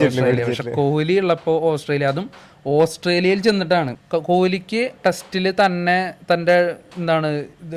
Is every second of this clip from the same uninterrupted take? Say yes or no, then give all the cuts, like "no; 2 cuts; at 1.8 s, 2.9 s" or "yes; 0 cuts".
no; 1 cut; at 4.0 s